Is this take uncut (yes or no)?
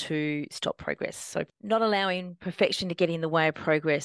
no